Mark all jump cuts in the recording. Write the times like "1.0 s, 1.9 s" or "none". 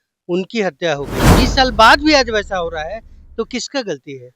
1.3 s